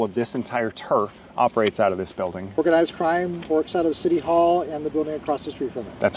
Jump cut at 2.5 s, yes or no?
yes